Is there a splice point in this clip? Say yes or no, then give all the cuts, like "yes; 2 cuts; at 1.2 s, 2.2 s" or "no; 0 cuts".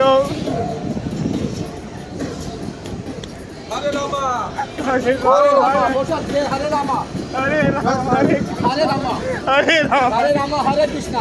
no; 0 cuts